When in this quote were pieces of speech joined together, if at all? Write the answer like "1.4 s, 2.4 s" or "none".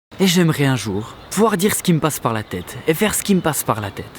1.1 s